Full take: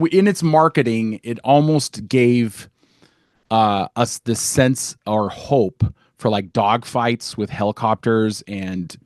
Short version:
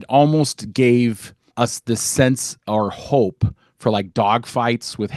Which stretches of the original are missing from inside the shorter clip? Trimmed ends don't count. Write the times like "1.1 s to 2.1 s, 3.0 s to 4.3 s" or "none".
2.9 s to 3.9 s